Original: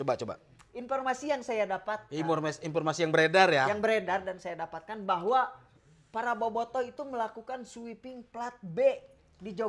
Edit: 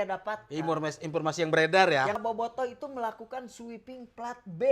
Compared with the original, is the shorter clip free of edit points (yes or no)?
no